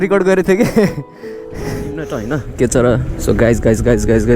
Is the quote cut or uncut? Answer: cut